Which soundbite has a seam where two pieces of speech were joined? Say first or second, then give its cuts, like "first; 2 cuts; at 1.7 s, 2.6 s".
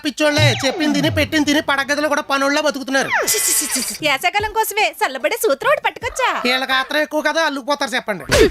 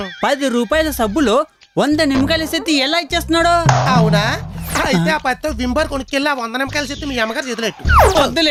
first; 1 cut; at 4.0 s